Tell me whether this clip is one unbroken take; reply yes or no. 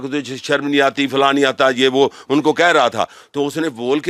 yes